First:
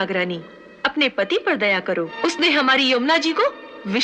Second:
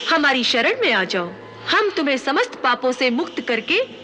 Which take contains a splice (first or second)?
first